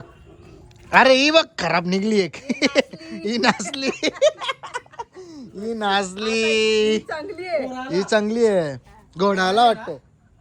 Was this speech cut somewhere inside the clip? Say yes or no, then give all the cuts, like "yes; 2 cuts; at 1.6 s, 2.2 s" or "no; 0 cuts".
no; 0 cuts